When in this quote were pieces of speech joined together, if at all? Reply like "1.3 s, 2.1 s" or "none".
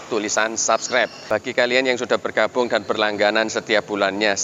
1.2 s